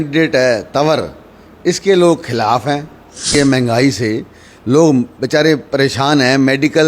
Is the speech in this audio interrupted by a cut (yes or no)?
yes